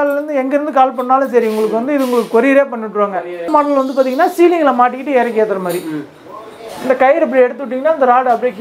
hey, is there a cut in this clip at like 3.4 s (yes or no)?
yes